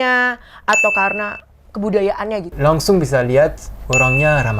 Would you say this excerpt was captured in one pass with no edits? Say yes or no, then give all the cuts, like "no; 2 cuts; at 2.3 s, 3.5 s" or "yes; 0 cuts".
no; 1 cut; at 2.5 s